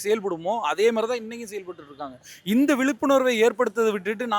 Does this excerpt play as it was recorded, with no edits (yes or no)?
yes